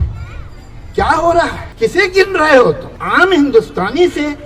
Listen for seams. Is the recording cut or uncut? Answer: cut